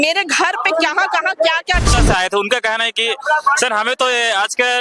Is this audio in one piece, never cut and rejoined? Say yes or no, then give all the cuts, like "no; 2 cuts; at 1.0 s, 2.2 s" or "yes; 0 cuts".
no; 1 cut; at 2.0 s